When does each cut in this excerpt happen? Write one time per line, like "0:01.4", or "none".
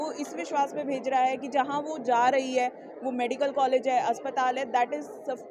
none